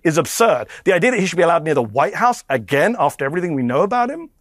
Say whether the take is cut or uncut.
uncut